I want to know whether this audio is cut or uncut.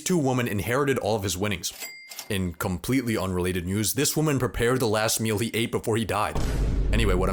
uncut